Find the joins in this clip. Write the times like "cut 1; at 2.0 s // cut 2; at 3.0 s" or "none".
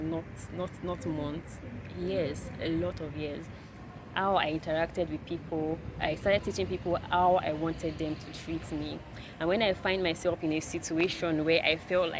cut 1; at 3.5 s